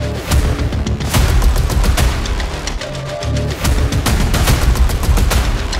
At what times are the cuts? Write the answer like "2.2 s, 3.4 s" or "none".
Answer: none